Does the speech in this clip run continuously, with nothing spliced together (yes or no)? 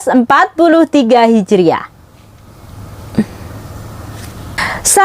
no